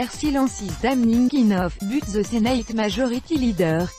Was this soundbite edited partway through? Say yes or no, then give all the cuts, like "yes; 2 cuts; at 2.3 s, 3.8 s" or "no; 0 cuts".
no; 0 cuts